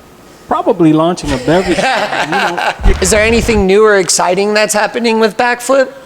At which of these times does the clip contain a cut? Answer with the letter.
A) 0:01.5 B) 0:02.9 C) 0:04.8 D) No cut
B